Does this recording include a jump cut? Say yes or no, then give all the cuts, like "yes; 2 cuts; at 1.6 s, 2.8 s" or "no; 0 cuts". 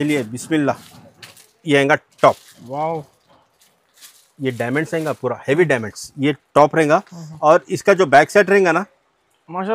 no; 0 cuts